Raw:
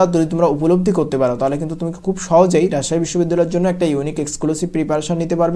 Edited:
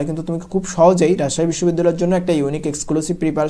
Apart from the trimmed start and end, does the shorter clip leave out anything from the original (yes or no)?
no